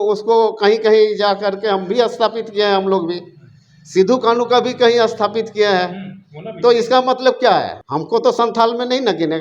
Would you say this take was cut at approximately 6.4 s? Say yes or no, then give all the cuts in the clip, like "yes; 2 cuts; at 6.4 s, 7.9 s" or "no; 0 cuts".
no; 1 cut; at 7.8 s